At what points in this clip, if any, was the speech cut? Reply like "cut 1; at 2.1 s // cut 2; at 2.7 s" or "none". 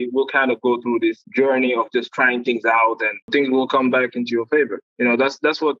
cut 1; at 3.2 s